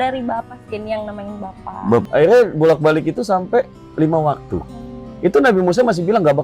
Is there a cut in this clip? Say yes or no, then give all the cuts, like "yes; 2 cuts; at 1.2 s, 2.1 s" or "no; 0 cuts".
yes; 1 cut; at 2.0 s